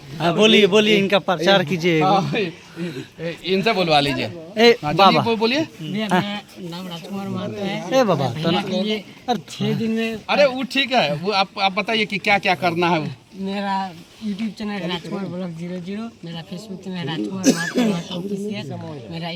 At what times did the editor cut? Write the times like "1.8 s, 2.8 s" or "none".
none